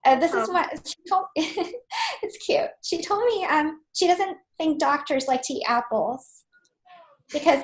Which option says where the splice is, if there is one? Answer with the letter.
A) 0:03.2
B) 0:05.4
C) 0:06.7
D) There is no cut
D